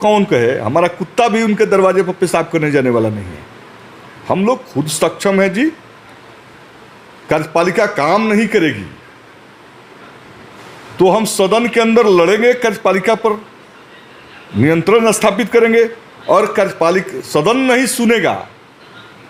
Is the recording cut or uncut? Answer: uncut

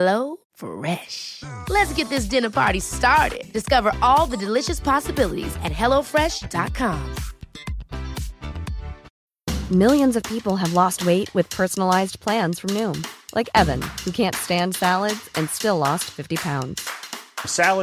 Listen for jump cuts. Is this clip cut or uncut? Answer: cut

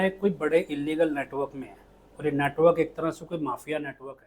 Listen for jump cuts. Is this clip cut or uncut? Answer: uncut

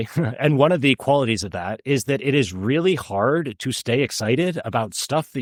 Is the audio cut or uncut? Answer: uncut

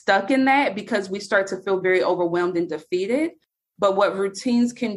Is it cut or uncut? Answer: uncut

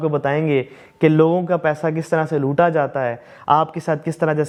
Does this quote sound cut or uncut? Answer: uncut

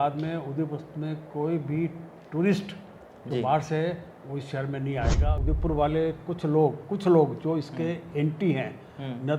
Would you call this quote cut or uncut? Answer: cut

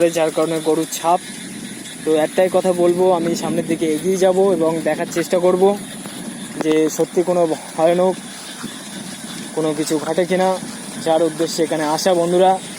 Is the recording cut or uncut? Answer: uncut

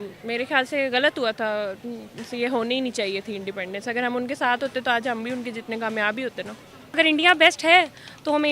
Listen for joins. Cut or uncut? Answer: cut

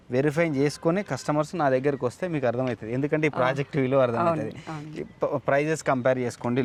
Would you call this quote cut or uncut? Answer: uncut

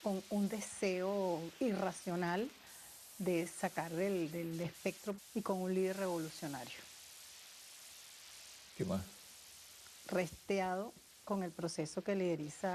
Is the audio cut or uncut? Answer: uncut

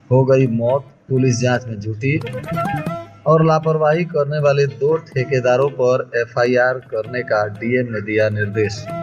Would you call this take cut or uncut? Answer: uncut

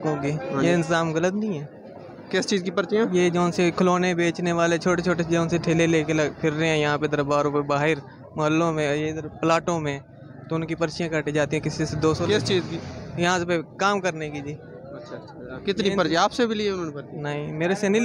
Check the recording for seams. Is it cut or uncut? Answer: uncut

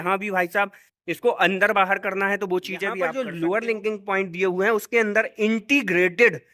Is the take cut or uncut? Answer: cut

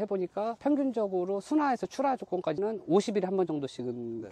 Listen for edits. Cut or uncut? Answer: uncut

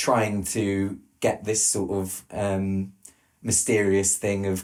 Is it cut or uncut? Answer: uncut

